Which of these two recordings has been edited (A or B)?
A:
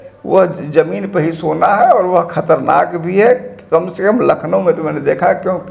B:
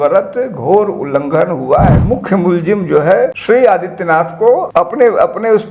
B